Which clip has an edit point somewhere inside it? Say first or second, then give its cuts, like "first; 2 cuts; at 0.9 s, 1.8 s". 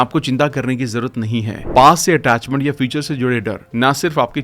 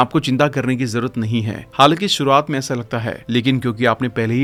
first; 1 cut; at 1.6 s